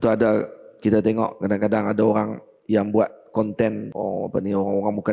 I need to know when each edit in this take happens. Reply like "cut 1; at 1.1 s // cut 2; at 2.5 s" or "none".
cut 1; at 3.9 s